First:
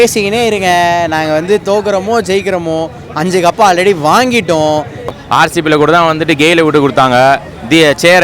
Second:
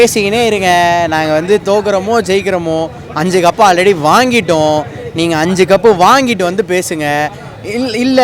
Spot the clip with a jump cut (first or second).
first